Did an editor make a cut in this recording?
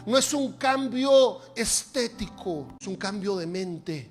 yes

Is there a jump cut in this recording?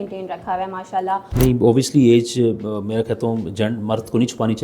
yes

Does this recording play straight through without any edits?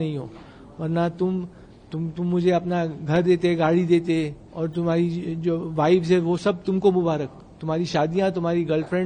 yes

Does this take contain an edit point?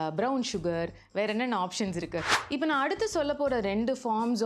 yes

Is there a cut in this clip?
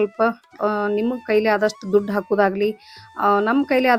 no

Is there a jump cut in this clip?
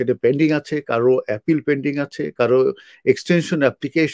no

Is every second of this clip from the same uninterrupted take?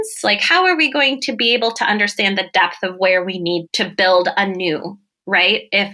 no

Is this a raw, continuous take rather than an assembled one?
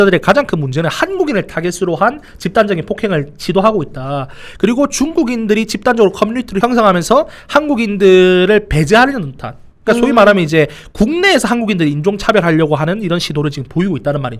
no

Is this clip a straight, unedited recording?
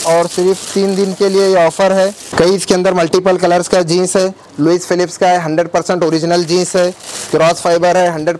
yes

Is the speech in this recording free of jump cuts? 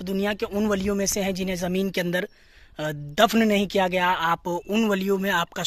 yes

